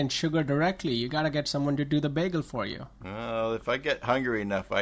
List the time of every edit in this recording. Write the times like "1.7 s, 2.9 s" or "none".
3.2 s